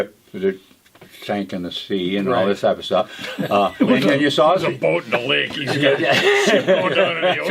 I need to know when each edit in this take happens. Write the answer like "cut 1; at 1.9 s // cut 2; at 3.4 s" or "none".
none